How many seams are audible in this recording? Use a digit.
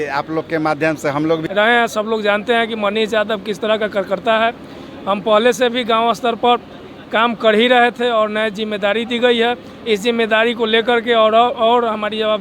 1